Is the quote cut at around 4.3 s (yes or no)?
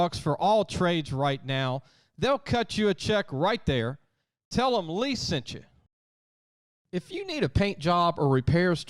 no